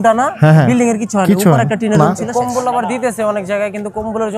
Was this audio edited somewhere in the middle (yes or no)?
yes